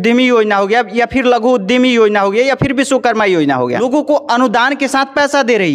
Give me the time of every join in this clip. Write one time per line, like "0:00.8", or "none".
0:03.8